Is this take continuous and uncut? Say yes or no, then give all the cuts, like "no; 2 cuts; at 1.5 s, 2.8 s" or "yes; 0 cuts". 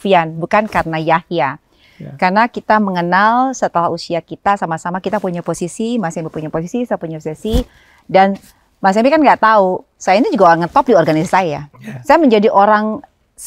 yes; 0 cuts